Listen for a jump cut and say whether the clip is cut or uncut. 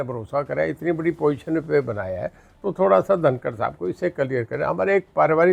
uncut